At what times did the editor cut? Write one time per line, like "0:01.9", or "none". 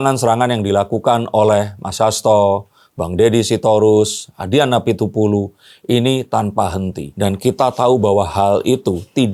none